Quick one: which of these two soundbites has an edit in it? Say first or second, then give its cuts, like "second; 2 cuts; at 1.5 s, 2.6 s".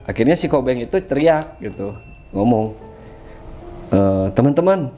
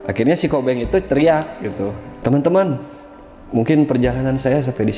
second; 1 cut; at 2.2 s